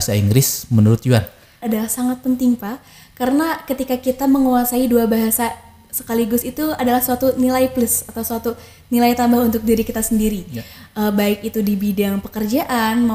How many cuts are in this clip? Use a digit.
1